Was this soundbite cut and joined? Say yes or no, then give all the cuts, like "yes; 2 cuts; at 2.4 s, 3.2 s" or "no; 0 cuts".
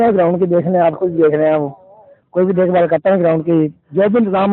no; 0 cuts